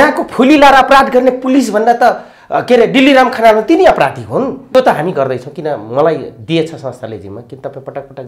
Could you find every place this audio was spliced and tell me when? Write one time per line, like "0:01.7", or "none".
0:04.7